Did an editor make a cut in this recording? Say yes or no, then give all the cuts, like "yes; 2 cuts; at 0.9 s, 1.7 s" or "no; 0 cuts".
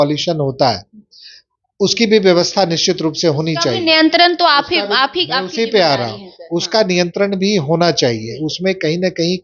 no; 0 cuts